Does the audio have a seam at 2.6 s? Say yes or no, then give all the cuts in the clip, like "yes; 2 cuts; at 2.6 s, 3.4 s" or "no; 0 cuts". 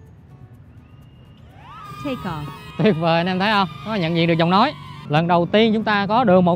no; 1 cut; at 4.9 s